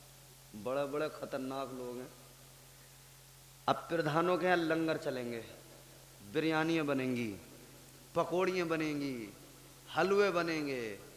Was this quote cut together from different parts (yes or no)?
no